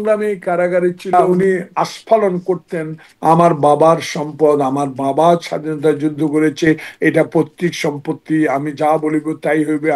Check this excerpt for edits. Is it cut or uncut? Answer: cut